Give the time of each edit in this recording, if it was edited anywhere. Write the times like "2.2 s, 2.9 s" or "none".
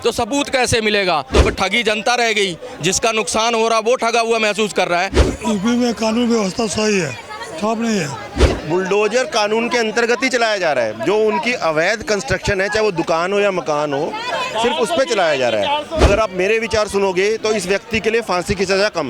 1.3 s, 5.2 s, 8.5 s, 15.9 s